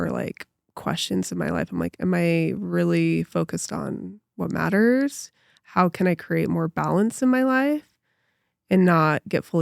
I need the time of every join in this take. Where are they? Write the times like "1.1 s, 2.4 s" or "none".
none